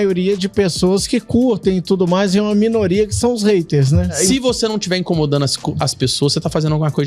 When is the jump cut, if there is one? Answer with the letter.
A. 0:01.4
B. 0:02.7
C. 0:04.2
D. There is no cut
C